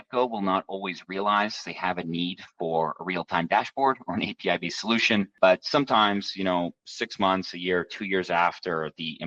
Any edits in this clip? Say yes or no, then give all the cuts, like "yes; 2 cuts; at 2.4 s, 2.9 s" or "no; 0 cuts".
no; 0 cuts